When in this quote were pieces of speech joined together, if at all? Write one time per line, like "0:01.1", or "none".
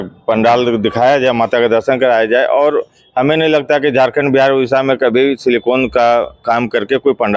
none